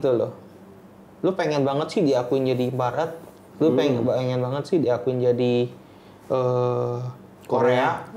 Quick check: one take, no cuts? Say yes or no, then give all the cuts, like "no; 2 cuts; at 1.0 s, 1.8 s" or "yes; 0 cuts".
yes; 0 cuts